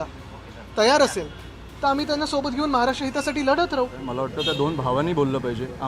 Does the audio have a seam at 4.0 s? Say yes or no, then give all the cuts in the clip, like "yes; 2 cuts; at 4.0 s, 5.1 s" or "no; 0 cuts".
yes; 1 cut; at 4.0 s